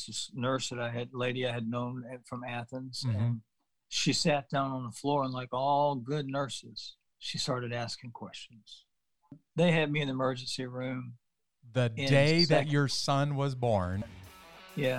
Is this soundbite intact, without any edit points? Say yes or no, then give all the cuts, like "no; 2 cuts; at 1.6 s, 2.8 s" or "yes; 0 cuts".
no; 2 cuts; at 9.4 s, 14.1 s